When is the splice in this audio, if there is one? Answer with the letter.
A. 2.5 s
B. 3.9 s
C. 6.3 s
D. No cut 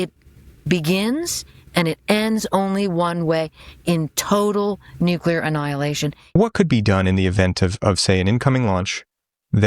C